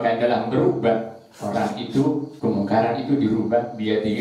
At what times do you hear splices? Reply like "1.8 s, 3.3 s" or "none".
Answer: 2.3 s